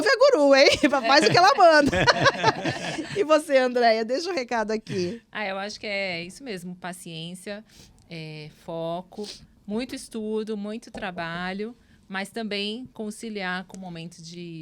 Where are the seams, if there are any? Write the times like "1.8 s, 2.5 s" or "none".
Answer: none